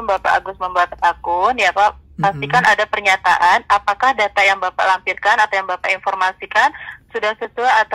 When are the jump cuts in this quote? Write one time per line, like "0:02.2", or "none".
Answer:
none